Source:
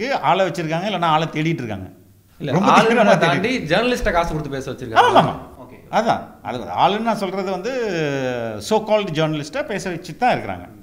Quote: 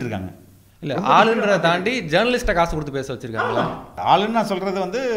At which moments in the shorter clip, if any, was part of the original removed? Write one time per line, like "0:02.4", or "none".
0:03.4